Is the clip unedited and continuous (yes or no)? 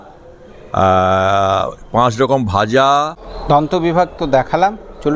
no